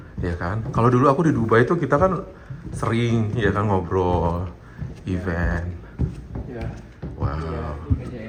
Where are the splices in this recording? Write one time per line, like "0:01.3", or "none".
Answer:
none